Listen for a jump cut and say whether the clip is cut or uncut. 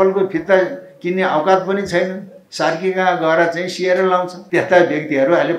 cut